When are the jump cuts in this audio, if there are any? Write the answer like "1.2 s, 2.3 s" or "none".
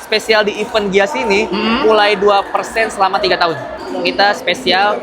3.8 s